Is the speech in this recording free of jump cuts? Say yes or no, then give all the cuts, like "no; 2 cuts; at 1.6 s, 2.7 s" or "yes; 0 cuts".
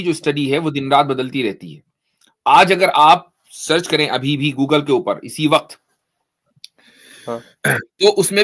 yes; 0 cuts